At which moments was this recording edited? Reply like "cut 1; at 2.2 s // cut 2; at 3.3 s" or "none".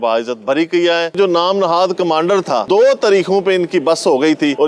cut 1; at 1.2 s // cut 2; at 2.7 s